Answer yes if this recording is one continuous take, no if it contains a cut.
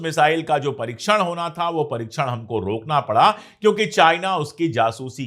yes